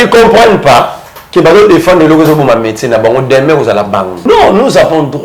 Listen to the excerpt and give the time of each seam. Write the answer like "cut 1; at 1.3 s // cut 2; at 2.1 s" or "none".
cut 1; at 4.2 s